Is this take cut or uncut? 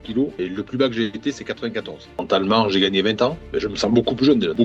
cut